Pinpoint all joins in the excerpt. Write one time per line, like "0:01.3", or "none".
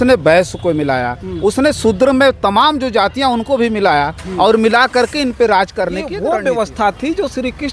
0:06.1